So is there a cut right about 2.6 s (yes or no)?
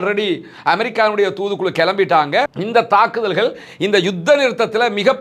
yes